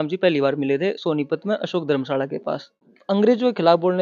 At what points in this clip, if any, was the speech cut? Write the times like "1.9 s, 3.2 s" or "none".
2.9 s